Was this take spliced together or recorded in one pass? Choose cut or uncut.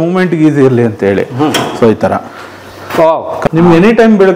cut